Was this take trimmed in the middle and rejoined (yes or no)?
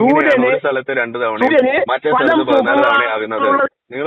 no